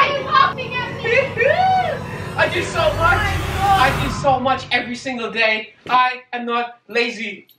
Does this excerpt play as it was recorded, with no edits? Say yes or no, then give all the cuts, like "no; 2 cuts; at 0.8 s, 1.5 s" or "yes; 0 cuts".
yes; 0 cuts